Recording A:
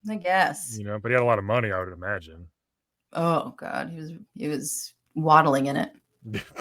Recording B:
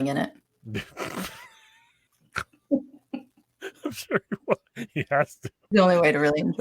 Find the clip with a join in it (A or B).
B